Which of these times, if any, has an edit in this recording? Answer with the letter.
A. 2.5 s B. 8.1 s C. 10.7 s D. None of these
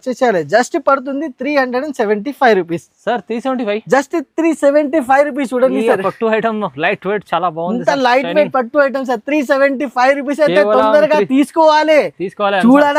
D